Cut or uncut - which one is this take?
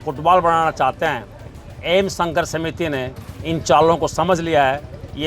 cut